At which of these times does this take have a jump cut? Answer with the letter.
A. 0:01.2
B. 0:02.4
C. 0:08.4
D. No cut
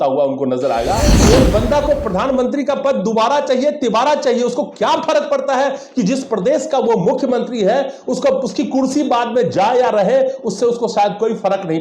A